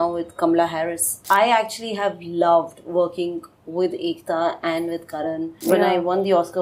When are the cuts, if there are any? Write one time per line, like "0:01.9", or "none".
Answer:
0:01.1
0:05.5